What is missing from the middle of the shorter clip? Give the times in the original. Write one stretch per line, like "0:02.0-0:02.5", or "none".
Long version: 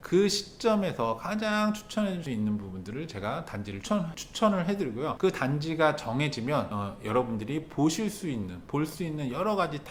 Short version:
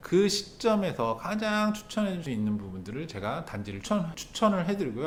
none